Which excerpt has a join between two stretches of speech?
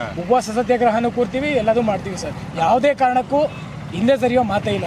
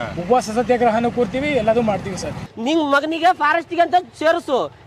second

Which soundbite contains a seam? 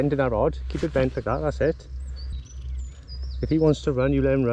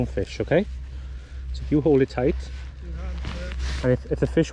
first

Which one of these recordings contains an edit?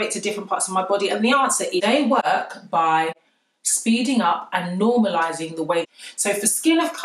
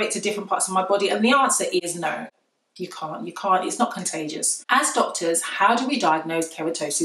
first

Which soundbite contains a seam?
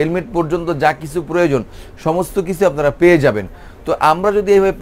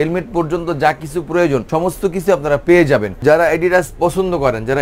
second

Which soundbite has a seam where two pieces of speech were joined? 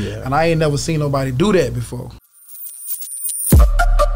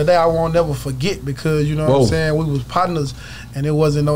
first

